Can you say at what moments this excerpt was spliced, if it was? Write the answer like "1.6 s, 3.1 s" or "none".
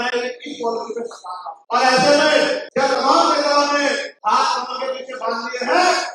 1.5 s, 2.6 s, 4.1 s